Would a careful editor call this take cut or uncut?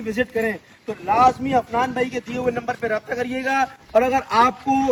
uncut